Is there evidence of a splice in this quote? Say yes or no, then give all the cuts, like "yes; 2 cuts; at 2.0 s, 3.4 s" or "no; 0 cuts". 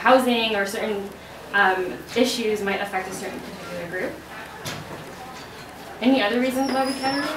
no; 0 cuts